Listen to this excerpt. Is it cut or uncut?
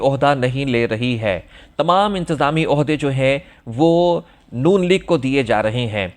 uncut